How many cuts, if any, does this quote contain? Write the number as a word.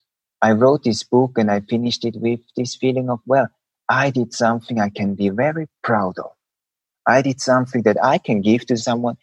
zero